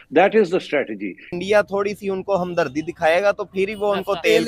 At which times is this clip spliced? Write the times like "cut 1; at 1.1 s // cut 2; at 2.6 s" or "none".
cut 1; at 1.3 s